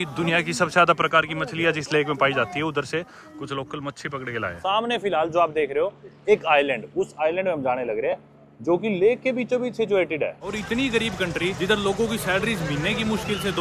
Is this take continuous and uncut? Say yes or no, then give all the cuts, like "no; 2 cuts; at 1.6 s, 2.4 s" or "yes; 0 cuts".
no; 3 cuts; at 4.6 s, 10.5 s, 11.6 s